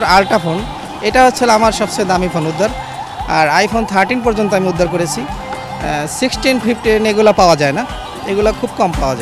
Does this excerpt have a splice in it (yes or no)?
no